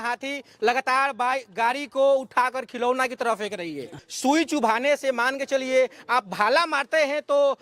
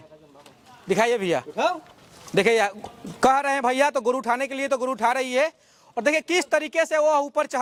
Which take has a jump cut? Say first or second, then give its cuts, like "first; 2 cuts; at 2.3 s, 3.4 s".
first; 1 cut; at 3.9 s